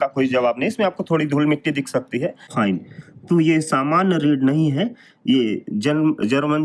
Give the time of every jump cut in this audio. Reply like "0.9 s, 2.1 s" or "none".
2.5 s